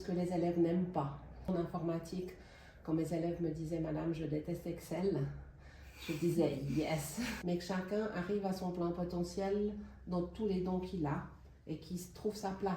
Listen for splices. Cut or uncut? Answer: cut